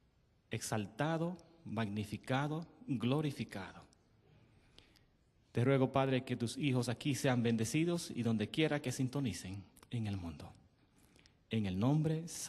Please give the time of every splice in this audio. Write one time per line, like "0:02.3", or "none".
0:10.1